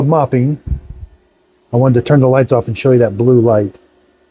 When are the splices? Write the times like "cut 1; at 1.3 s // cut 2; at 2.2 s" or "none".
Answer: none